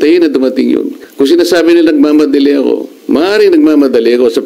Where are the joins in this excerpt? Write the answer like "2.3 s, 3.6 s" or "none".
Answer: 1.0 s